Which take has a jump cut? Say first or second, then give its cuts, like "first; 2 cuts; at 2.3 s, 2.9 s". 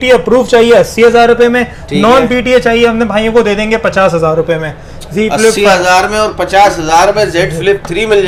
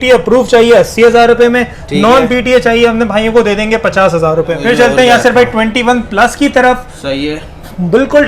second; 1 cut; at 4.6 s